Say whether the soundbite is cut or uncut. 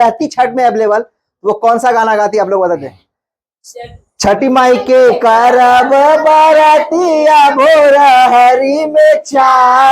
uncut